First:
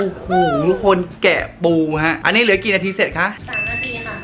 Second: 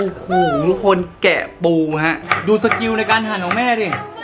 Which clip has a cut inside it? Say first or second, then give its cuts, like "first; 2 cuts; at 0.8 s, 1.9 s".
second; 1 cut; at 2.2 s